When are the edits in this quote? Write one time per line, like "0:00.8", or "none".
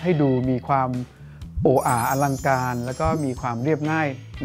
none